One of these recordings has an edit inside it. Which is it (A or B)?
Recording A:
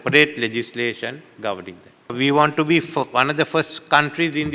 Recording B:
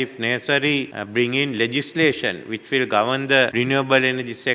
B